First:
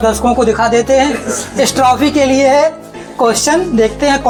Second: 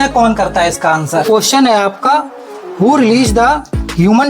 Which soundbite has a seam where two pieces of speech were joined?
second; 1 cut; at 1.3 s

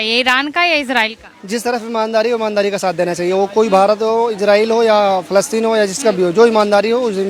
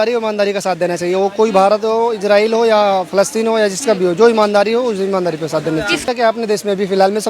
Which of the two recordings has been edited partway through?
second; 1 cut; at 6.0 s

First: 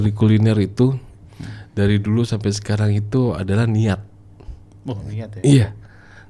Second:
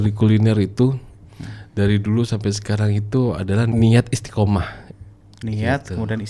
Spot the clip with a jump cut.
second; 1 cut; at 3.7 s

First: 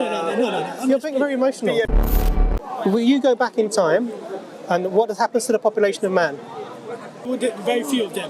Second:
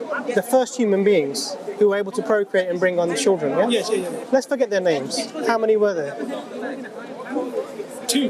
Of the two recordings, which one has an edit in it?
first; 2 cuts; at 2.2 s, 7.3 s

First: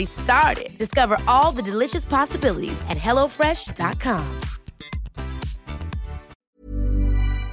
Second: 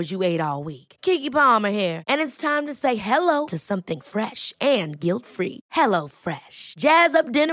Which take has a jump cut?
first; 1 cut; at 6.5 s

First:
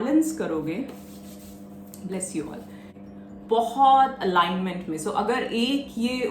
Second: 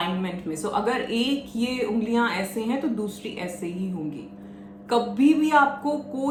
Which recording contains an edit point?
first; 1 cut; at 3.0 s

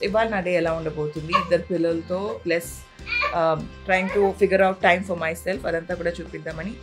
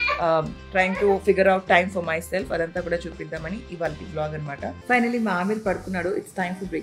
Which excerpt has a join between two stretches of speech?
second; 1 cut; at 4.8 s

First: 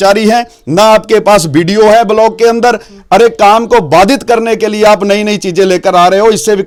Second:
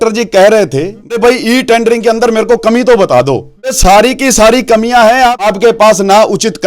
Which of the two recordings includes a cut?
second; 3 cuts; at 1.1 s, 3.8 s, 5.5 s

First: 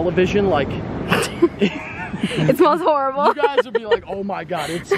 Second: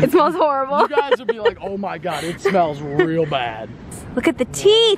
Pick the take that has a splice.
second; 1 cut; at 3.8 s

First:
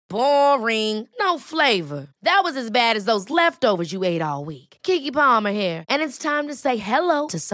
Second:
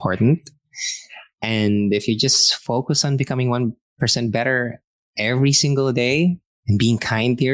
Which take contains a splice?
second; 1 cut; at 6.5 s

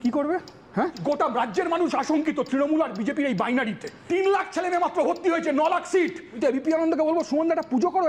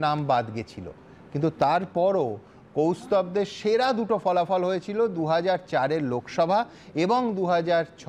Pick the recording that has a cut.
first; 3 cuts; at 1.0 s, 3.9 s, 6.4 s

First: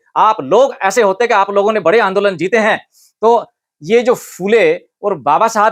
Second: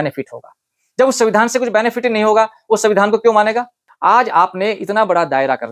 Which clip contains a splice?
second; 1 cut; at 3.8 s

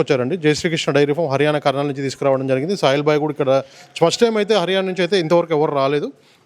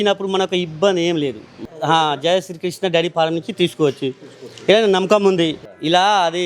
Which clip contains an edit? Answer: second; 2 cuts; at 1.5 s, 5.6 s

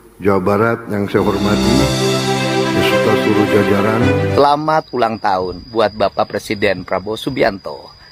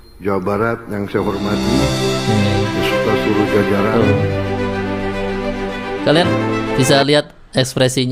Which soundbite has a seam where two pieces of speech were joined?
first; 1 cut; at 4.3 s

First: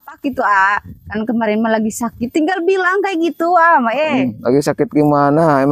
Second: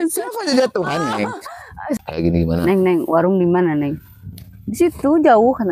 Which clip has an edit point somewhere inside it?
second; 1 cut; at 2.0 s

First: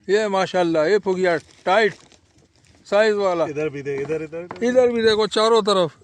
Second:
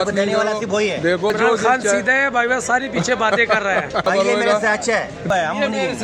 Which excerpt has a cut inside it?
second; 3 cuts; at 1.3 s, 4.1 s, 5.3 s

